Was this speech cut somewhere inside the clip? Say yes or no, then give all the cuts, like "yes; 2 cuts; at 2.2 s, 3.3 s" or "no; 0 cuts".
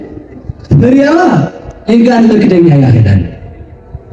no; 0 cuts